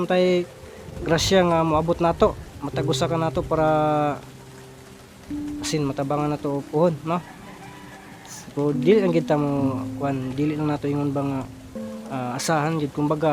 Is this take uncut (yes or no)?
yes